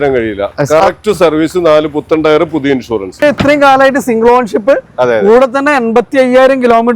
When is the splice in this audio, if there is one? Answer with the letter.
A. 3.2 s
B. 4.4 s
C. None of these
A